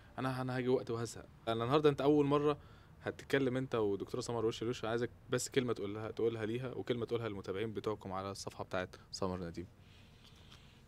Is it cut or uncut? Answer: uncut